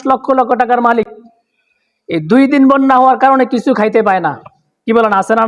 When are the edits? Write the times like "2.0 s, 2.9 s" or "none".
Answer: none